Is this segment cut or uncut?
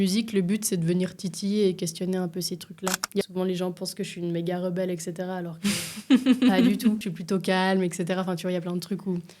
cut